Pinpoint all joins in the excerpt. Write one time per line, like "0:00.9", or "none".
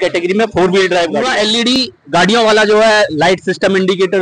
0:01.2